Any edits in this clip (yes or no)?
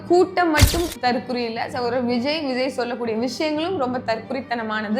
no